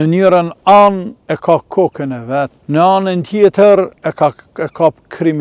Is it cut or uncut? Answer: cut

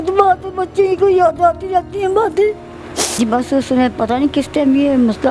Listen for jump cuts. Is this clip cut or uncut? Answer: cut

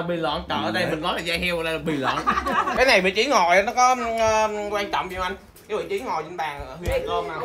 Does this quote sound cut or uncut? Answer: cut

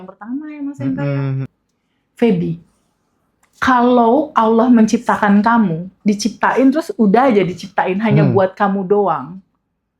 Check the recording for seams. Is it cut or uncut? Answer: cut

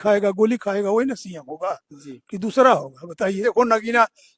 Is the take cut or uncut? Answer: cut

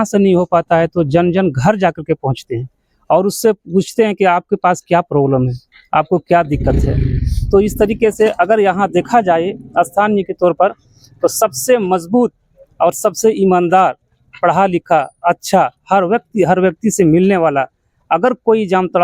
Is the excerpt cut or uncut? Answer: uncut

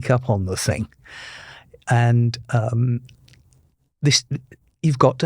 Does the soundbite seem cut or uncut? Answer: uncut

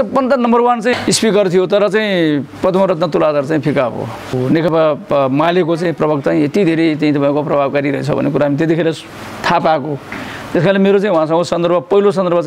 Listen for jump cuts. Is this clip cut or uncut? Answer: cut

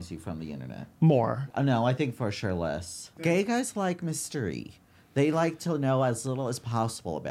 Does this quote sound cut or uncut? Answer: cut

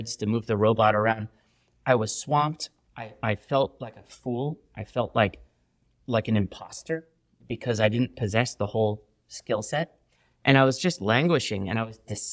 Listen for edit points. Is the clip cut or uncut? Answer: uncut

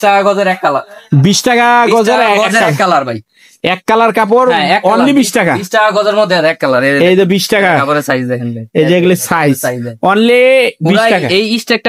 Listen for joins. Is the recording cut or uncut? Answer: uncut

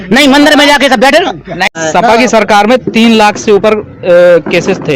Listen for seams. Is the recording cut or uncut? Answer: cut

